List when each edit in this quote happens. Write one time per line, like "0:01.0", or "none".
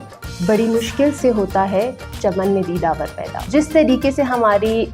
0:03.4